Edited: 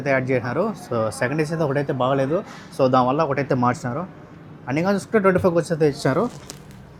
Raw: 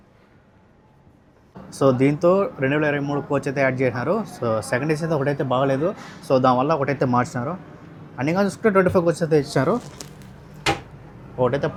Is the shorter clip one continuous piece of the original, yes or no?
yes